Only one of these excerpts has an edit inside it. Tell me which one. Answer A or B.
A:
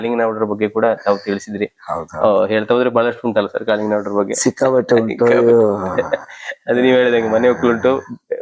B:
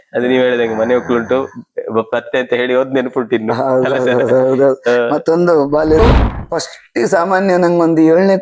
B